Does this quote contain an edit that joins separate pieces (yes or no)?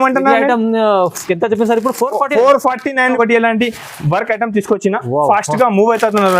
yes